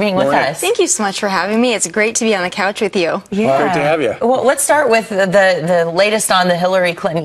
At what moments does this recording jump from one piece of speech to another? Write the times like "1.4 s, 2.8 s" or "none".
5.7 s